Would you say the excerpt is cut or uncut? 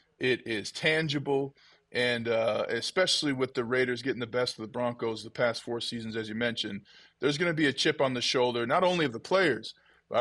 uncut